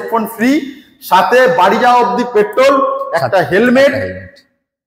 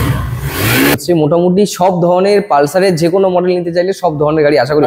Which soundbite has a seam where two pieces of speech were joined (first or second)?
second